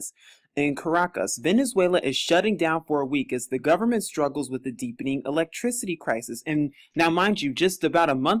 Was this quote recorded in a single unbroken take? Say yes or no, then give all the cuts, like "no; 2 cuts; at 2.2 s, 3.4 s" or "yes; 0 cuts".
no; 1 cut; at 1.7 s